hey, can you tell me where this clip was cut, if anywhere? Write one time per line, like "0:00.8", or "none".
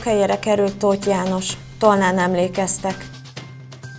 0:03.0

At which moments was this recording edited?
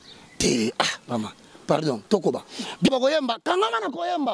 0:02.9

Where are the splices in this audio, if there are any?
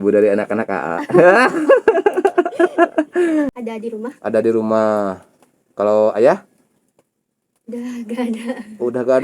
0:03.5

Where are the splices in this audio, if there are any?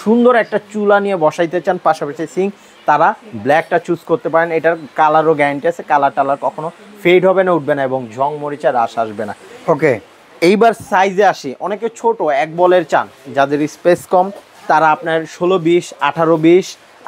none

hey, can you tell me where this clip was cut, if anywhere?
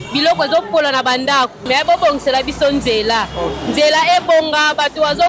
0:01.6

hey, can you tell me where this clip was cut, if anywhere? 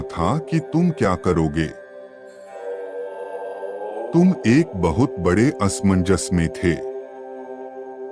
0:06.8

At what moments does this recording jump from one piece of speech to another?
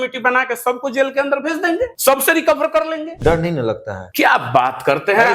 0:02.0
0:03.2
0:03.9

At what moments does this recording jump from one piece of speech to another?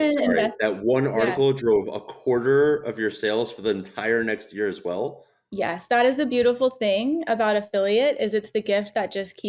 none

